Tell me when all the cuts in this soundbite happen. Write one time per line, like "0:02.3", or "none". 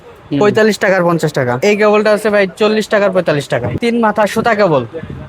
0:01.5
0:03.7